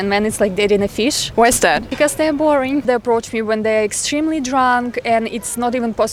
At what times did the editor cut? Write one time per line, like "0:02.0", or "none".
none

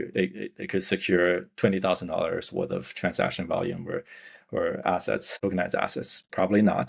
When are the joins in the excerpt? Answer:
0:05.3

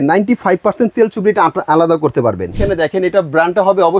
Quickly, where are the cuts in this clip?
0:02.6

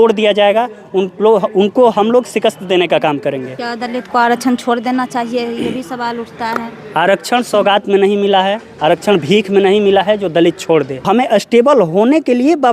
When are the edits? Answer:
0:03.5
0:11.1

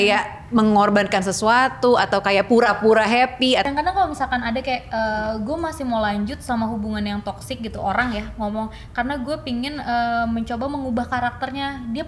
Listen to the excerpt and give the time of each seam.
0:03.7

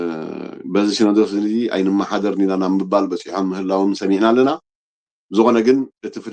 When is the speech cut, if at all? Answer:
none

